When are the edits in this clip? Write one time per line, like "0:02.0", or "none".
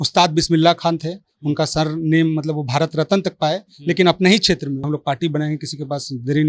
0:04.8